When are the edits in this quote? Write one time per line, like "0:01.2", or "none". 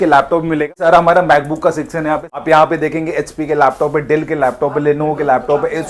0:00.7
0:02.3